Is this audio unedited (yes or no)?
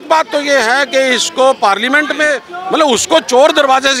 no